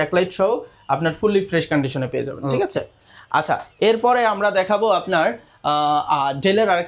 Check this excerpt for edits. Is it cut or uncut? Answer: uncut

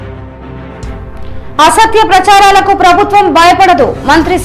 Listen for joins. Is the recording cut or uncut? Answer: cut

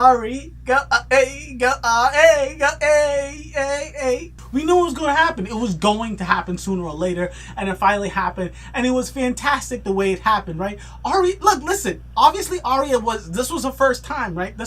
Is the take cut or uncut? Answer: cut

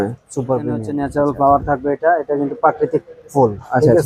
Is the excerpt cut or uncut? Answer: cut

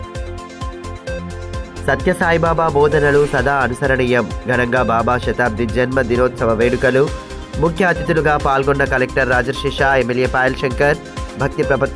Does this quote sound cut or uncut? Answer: cut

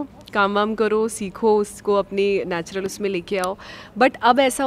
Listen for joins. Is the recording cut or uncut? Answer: uncut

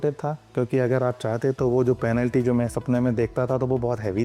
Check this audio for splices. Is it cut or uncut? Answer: uncut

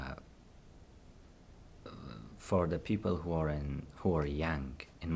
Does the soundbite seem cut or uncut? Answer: uncut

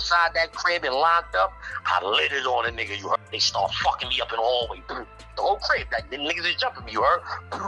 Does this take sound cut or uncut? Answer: cut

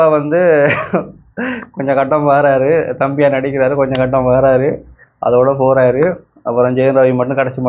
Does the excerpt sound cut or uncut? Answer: uncut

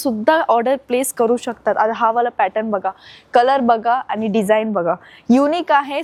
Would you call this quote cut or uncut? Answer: uncut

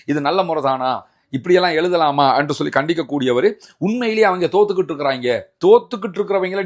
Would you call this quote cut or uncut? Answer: uncut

